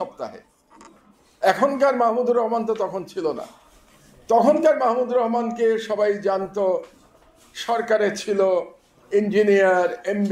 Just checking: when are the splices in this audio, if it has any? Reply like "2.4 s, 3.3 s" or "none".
none